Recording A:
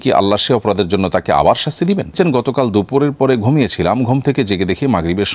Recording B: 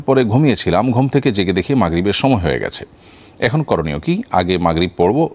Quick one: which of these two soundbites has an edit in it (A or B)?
A